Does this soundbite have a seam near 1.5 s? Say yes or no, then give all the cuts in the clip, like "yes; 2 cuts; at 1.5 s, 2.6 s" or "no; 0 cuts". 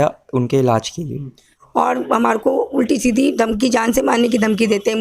yes; 1 cut; at 1.5 s